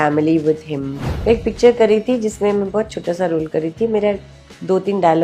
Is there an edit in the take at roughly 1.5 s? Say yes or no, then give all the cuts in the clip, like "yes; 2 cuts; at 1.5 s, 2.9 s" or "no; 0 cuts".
yes; 1 cut; at 1.5 s